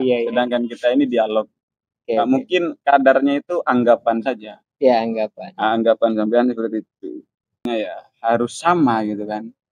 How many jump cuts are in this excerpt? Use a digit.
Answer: 1